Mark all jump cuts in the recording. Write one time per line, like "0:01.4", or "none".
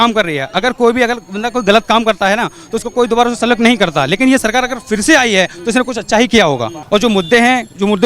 0:06.7

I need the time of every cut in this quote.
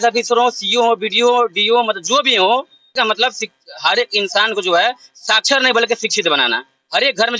0:02.9

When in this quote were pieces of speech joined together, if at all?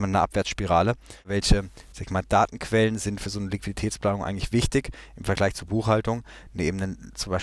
0:01.3

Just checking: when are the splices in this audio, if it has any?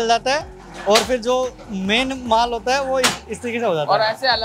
none

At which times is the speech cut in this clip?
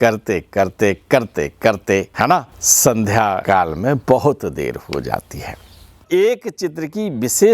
0:02.2
0:03.9
0:06.0

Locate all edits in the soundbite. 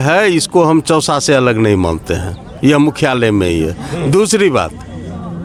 none

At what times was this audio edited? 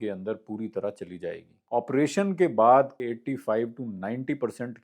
0:01.5
0:03.0

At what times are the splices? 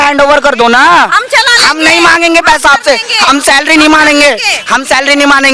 none

